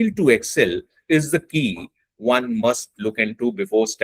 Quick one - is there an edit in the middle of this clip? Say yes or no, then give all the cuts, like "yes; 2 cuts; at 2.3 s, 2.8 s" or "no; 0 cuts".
no; 0 cuts